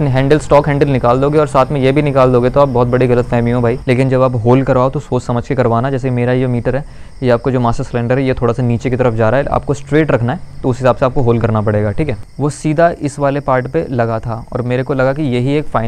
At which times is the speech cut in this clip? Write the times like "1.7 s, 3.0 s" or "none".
3.8 s, 12.2 s